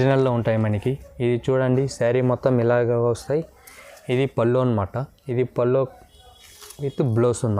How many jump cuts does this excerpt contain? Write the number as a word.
zero